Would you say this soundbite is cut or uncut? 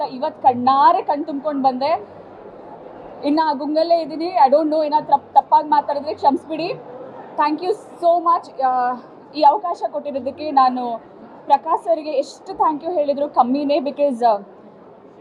uncut